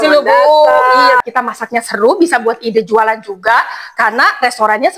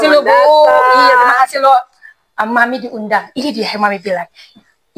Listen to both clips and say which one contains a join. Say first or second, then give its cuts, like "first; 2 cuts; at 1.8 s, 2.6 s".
first; 1 cut; at 1.2 s